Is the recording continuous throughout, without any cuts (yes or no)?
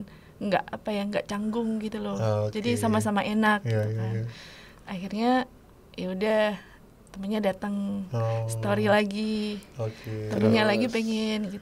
yes